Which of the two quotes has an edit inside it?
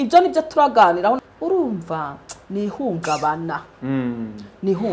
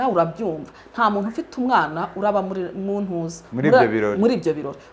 first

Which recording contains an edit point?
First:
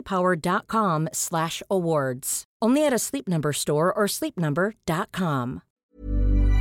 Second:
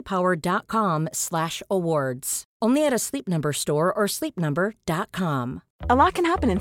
first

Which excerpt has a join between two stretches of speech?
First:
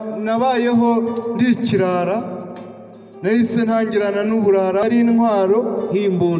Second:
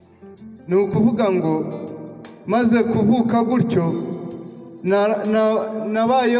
first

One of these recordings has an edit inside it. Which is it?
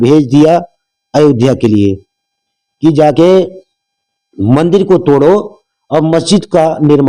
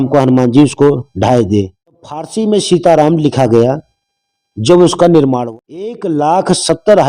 second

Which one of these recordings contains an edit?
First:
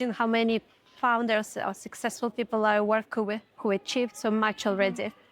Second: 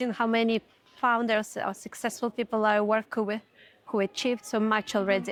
first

